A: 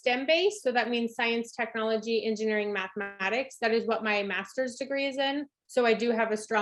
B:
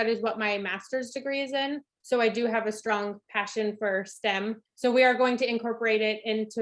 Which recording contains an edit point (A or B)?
B